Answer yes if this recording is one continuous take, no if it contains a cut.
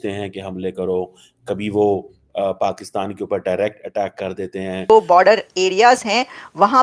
no